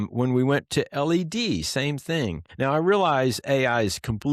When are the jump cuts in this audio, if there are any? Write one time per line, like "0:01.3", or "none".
0:02.4